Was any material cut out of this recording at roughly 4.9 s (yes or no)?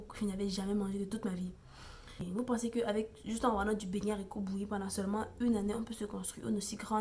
no